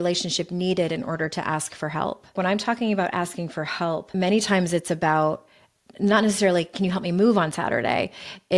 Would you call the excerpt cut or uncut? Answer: cut